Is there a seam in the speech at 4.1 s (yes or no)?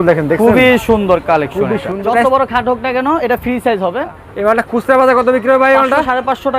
yes